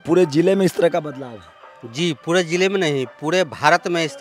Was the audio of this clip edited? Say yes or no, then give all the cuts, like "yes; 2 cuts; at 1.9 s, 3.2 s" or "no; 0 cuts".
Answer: no; 0 cuts